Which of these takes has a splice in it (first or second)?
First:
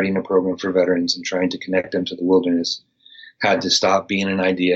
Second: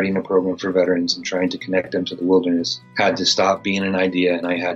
second